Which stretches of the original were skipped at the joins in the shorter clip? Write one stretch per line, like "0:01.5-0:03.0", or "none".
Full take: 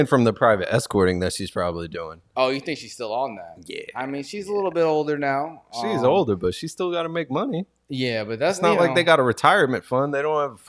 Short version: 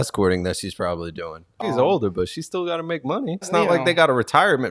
0:02.3-0:05.8
0:07.7-0:08.6